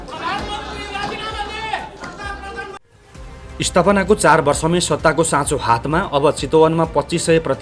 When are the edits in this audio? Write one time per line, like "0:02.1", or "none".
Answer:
0:02.9